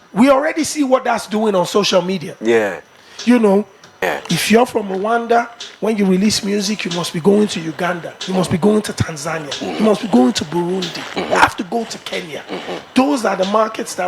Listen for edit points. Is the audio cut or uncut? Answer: cut